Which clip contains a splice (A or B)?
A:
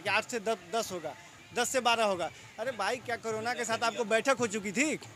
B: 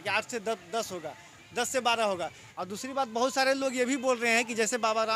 B